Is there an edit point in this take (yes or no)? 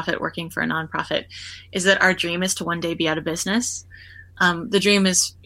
no